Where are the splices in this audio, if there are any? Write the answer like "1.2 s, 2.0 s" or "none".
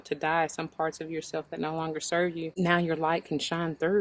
2.5 s